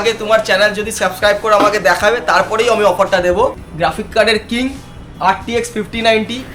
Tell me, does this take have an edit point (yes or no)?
yes